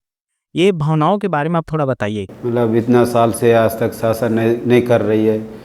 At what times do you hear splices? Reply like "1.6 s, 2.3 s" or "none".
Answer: 2.2 s